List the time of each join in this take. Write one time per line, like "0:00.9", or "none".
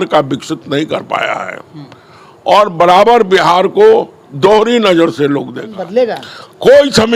0:05.8

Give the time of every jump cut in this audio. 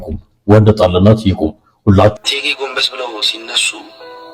0:02.2

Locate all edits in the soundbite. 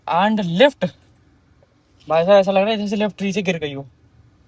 none

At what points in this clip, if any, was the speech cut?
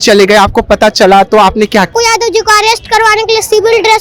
0:01.9

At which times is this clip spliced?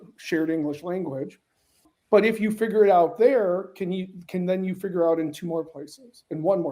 0:01.9

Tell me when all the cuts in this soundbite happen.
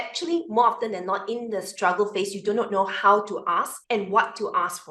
0:03.8

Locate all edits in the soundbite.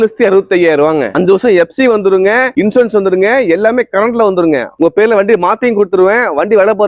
0:01.1
0:04.7

